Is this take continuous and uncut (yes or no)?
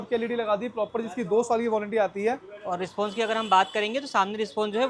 yes